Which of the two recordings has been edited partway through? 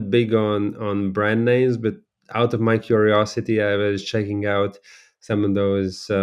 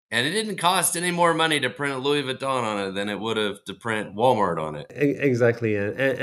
second; 1 cut; at 4.8 s

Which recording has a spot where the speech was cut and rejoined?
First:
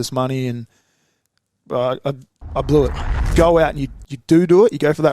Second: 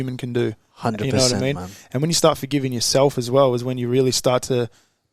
first; 1 cut; at 3.3 s

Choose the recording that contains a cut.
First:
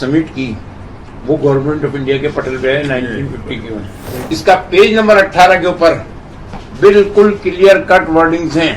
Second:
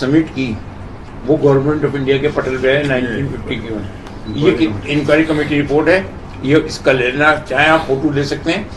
first; 1 cut; at 4.1 s

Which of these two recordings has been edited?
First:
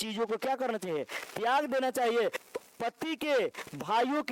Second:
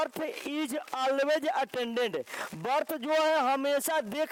first; 1 cut; at 2.4 s

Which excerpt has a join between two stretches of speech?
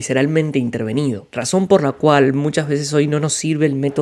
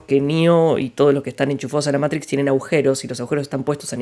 first; 1 cut; at 1.3 s

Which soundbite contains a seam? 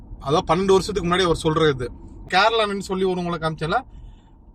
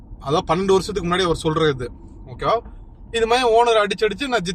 first; 1 cut; at 2.2 s

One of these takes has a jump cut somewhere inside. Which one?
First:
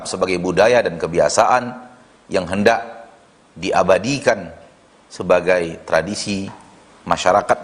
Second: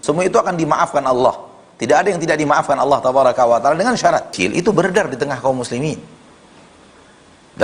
second; 1 cut; at 4.3 s

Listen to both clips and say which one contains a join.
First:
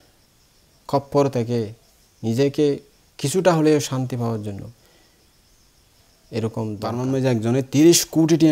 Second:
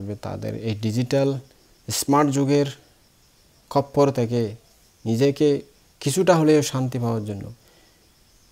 first; 1 cut; at 7.0 s

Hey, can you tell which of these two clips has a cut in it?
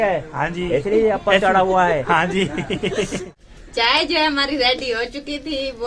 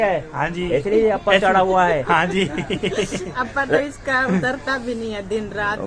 first; 1 cut; at 3.3 s

